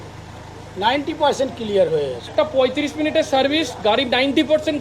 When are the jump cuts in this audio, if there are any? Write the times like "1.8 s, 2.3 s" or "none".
2.3 s